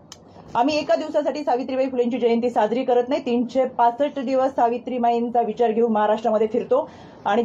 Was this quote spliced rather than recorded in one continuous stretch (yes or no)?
no